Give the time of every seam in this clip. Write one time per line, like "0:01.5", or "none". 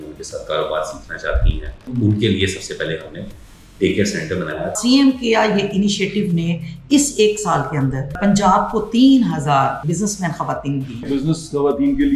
0:01.9
0:04.7
0:08.2
0:09.8
0:11.1